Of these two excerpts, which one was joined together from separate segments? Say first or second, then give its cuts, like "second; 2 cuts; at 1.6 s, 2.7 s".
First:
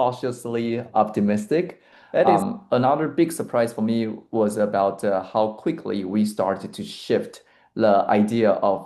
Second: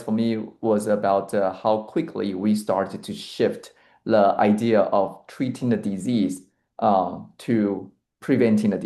first; 1 cut; at 2.3 s